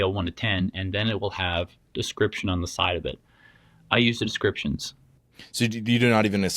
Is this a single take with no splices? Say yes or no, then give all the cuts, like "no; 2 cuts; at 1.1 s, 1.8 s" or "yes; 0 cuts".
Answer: no; 1 cut; at 5.6 s